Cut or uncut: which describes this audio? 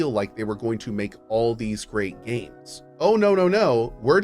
cut